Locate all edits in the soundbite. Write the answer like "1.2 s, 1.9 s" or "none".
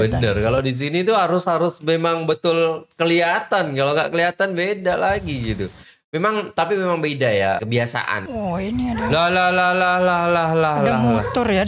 8.2 s